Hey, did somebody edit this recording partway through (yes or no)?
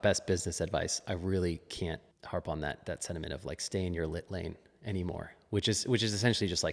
yes